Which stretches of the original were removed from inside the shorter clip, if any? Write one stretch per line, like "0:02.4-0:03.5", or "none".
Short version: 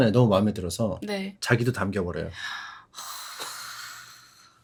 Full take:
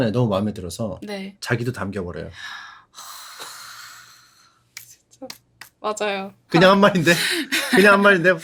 none

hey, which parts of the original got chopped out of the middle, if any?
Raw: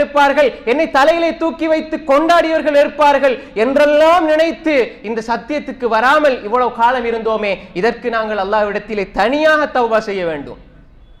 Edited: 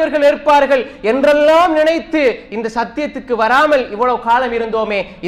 none

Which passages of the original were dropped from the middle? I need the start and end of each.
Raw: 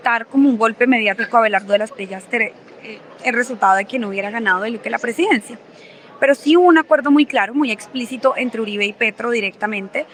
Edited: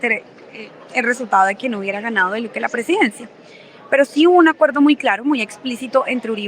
none

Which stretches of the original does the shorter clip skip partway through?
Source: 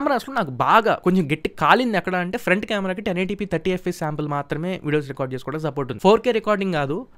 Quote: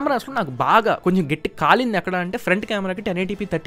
none

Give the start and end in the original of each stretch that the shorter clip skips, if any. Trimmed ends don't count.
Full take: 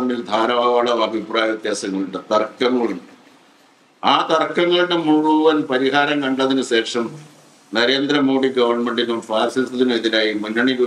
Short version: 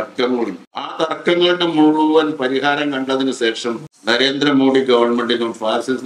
0:03.4-0:04.2
0:07.2-0:07.6

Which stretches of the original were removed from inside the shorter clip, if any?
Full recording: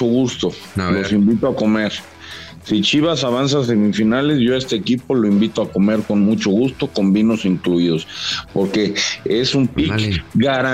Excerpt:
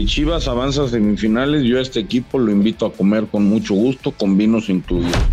none

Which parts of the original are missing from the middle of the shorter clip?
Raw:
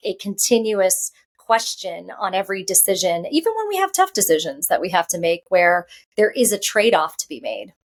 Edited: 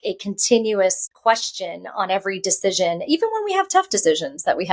0:01.1-0:01.3

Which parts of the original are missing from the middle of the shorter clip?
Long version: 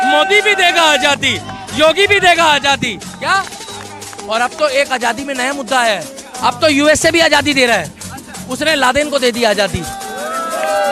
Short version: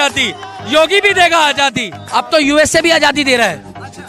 0:03.0-0:06.2

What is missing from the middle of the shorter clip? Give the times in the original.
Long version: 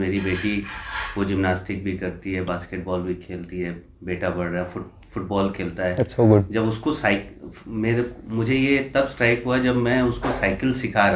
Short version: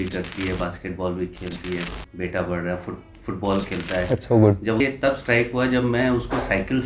0:06.7-0:08.7

